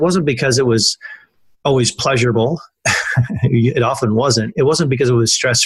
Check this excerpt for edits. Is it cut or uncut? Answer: uncut